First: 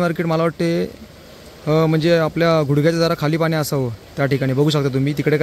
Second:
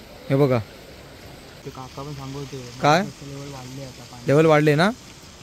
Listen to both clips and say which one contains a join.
second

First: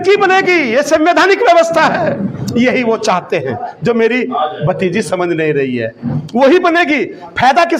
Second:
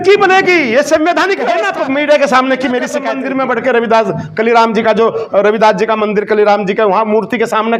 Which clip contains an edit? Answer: second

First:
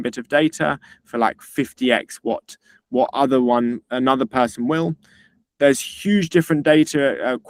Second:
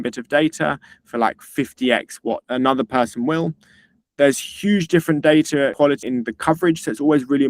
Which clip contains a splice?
second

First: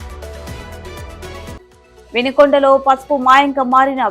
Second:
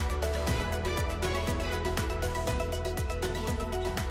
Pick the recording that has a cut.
first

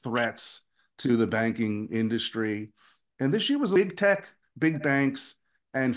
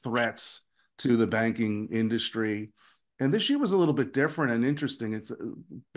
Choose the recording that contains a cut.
first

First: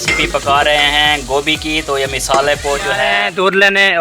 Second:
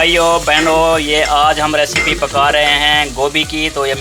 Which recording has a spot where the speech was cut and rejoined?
first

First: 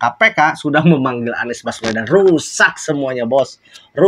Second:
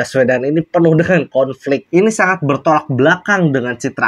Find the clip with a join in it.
second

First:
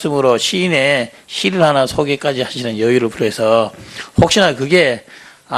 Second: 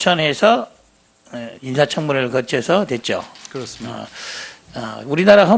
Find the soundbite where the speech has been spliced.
first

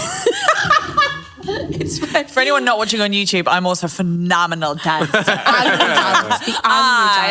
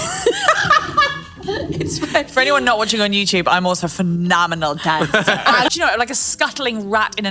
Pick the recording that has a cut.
second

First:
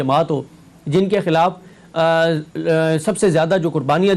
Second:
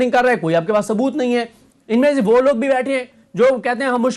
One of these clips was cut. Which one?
second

